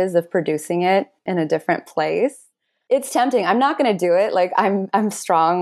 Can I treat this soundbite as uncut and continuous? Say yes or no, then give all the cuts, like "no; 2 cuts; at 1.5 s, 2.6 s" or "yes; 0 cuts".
yes; 0 cuts